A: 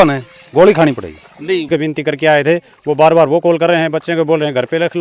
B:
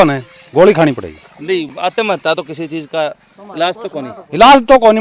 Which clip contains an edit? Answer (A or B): A